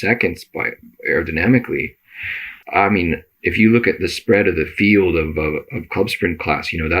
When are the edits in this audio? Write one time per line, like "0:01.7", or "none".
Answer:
0:02.5